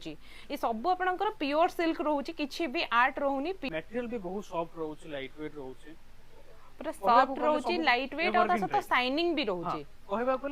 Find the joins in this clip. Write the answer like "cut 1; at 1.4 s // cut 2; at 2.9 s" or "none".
cut 1; at 3.7 s